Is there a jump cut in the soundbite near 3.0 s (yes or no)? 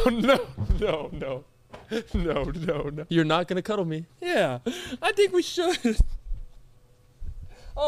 yes